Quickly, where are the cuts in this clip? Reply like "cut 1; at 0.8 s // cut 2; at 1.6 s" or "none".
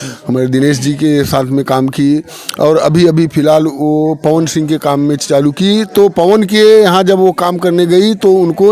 none